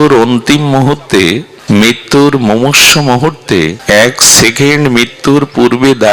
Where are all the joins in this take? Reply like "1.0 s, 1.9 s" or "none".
1.5 s, 3.8 s